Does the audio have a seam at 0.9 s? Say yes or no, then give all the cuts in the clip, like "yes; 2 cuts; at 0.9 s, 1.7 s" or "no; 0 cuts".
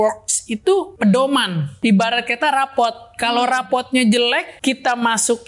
yes; 3 cuts; at 0.9 s, 1.8 s, 4.5 s